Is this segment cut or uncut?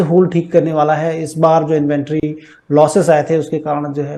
uncut